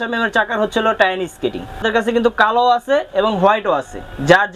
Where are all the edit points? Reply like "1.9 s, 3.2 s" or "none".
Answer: 1.8 s